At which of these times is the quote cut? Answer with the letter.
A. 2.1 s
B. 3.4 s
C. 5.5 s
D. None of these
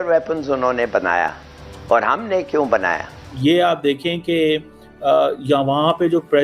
B